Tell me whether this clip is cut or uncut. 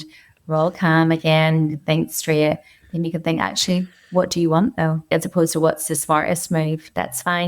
cut